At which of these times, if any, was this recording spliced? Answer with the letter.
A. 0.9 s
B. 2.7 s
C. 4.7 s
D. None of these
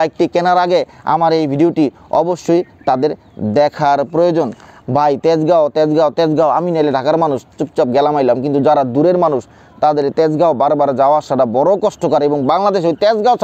C